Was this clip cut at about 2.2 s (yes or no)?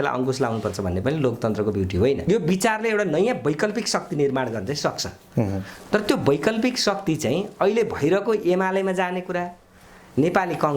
yes